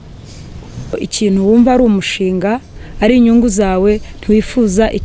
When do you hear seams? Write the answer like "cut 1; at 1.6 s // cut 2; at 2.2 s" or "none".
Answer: cut 1; at 1.1 s